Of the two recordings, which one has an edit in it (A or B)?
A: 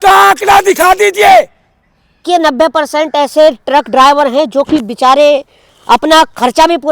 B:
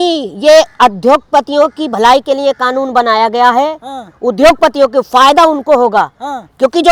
A